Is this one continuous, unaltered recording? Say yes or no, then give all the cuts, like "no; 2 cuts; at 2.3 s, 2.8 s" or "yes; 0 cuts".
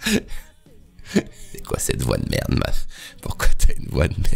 yes; 0 cuts